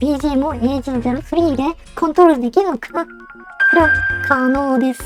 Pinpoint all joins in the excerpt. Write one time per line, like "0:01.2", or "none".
none